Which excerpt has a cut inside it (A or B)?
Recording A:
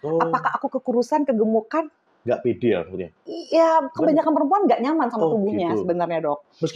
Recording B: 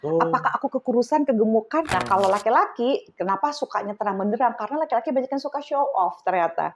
B